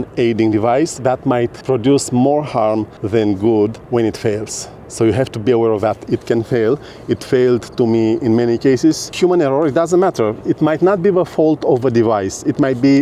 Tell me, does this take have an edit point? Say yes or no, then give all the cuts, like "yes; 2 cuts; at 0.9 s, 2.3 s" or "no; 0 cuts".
yes; 5 cuts; at 1.6 s, 2.9 s, 3.8 s, 9.1 s, 10.4 s